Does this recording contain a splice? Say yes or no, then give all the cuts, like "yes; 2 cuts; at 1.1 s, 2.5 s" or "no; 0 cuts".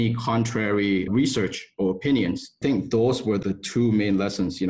yes; 3 cuts; at 1.1 s, 2.5 s, 3.4 s